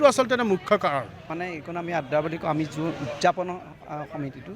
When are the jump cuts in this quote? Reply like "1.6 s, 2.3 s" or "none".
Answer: 1.3 s